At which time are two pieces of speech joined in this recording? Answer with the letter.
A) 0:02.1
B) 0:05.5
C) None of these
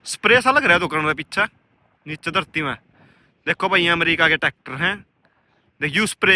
C